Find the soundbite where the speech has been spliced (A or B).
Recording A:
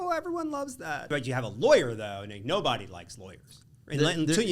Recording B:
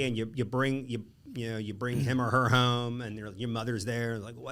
A